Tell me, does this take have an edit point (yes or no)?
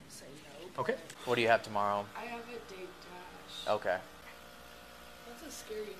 yes